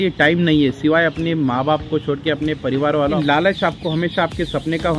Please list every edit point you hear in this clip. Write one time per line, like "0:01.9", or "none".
0:03.1